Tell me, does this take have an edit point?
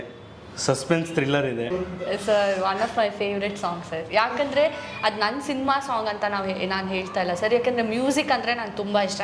yes; 1 cut; at 1.7 s

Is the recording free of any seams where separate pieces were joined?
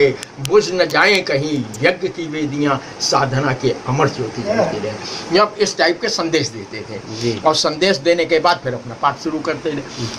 yes; 0 cuts

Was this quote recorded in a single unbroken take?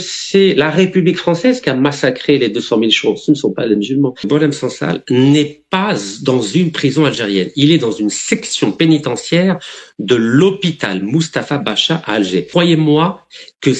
no; 2 cuts; at 4.3 s, 12.5 s

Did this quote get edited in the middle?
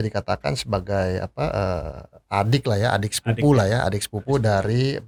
no; 0 cuts

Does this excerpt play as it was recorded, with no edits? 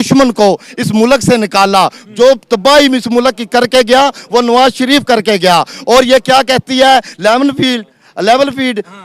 yes; 0 cuts

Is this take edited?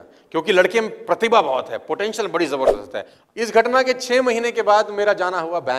yes; 1 cut; at 3.1 s

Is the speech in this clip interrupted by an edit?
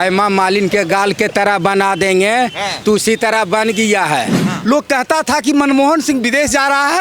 yes; 1 cut; at 4.4 s

